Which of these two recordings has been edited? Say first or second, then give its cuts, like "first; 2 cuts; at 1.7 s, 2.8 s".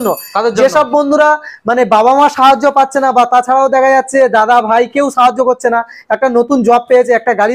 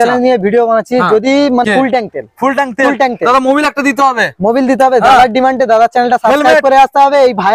second; 1 cut; at 1.6 s